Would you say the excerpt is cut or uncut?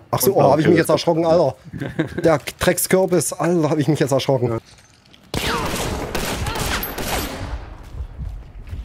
cut